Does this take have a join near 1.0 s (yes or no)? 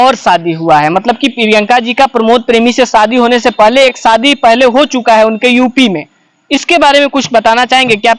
no